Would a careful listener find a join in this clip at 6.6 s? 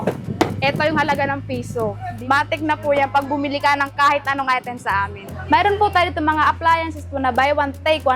no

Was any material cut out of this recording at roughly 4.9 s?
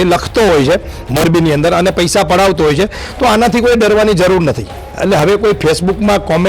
yes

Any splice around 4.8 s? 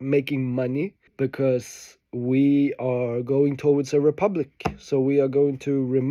no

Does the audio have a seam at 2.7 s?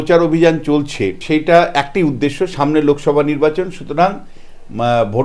no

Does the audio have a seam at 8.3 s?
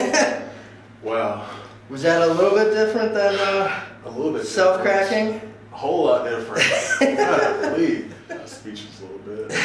yes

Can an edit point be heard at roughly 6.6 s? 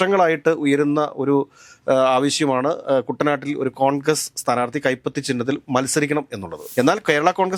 yes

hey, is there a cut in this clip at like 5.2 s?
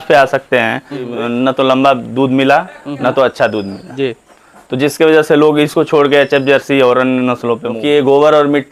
no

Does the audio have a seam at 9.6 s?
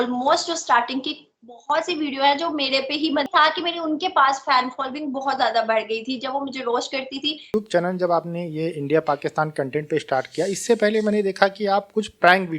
no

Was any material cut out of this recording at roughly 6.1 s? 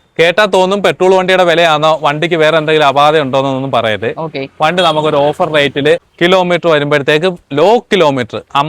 yes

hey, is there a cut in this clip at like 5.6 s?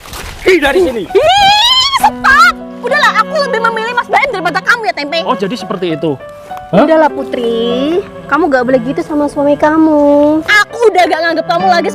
no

